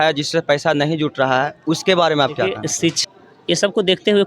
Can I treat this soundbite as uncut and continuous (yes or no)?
no